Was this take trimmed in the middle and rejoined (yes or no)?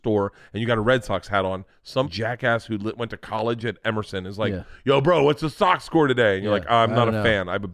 yes